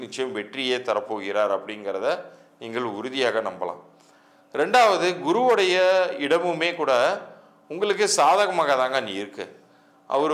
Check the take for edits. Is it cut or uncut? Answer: uncut